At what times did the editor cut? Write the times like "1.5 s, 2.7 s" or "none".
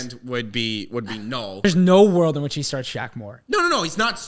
1.6 s

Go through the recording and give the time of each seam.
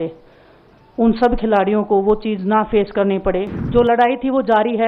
3.6 s

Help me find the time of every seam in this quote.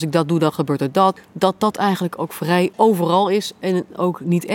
1.2 s, 2.7 s

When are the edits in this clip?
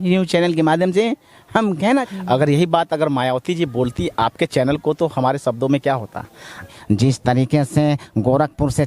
2.1 s, 6.7 s

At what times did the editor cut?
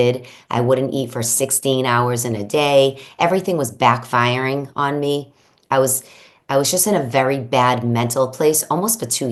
none

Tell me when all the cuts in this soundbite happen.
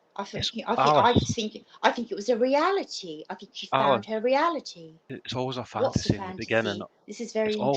5.2 s

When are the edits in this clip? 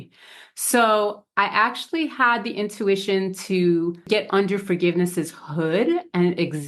4.0 s

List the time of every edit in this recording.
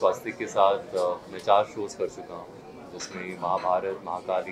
none

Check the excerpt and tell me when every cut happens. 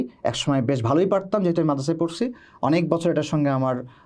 none

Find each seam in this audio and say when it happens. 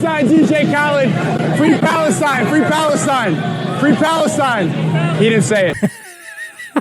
5.8 s

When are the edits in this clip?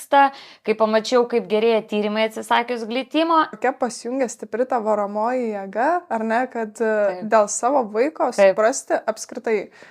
3.6 s

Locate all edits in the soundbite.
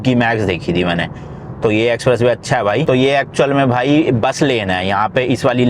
2.9 s

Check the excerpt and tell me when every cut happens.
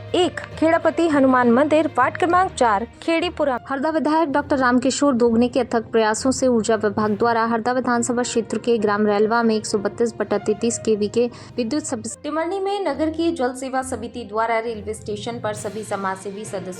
3.6 s, 12.1 s

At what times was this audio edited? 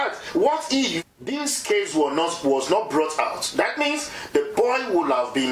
1.1 s

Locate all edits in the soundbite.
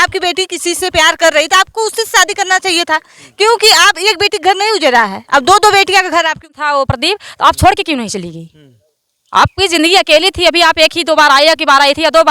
6.4 s

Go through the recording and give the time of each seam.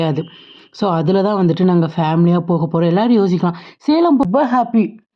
4.2 s

